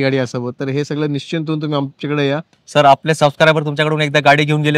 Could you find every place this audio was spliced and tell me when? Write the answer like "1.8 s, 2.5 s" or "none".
2.5 s